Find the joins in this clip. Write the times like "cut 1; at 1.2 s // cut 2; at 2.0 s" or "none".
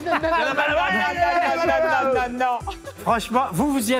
cut 1; at 3.0 s